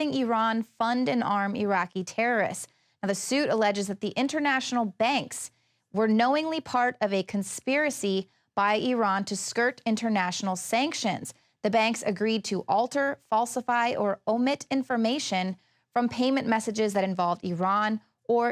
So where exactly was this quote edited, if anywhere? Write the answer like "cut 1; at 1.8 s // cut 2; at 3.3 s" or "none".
cut 1; at 14.1 s